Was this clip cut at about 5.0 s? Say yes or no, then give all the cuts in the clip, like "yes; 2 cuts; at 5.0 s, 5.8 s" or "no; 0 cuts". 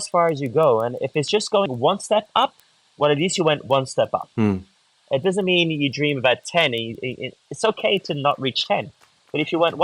no; 0 cuts